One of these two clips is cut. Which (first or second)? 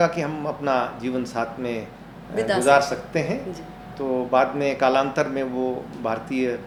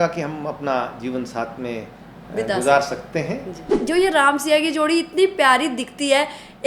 second